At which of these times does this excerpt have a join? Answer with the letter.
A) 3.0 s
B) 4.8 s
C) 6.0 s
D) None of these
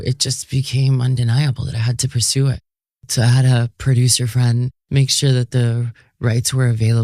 A